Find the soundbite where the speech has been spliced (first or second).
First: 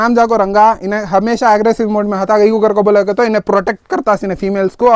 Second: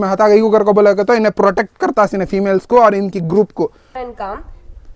second